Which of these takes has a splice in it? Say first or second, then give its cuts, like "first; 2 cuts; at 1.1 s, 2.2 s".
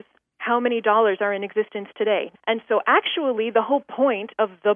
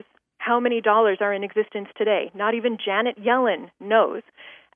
first; 1 cut; at 2.3 s